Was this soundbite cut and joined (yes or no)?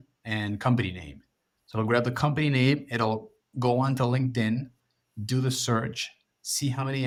no